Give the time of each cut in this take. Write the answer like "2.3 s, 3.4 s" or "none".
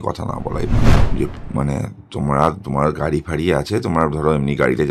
0.9 s